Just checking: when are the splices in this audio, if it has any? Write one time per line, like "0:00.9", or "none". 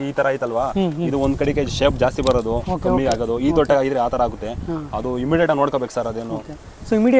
none